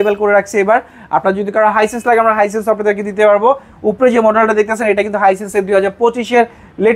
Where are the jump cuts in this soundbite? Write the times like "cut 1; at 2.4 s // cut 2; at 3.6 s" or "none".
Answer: none